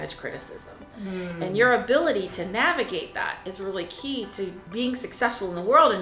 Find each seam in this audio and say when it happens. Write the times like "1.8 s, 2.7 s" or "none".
4.6 s